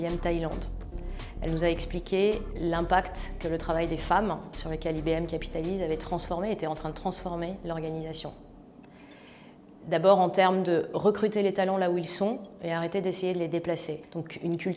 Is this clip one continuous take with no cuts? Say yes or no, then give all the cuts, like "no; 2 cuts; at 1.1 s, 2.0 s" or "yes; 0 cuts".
yes; 0 cuts